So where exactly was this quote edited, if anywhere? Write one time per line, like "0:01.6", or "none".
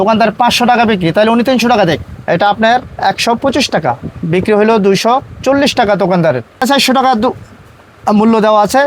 0:02.1
0:06.6